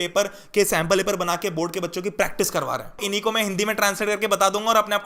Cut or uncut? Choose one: cut